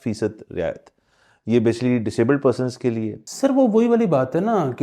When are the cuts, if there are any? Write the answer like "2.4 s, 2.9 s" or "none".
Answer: 3.2 s